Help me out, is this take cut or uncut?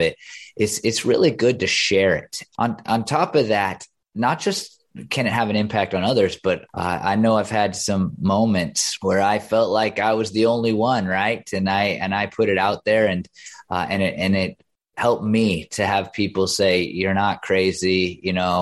cut